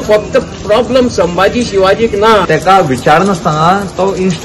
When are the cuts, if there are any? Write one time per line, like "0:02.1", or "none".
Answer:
0:02.4